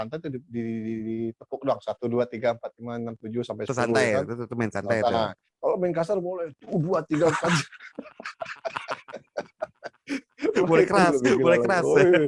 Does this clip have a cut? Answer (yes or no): no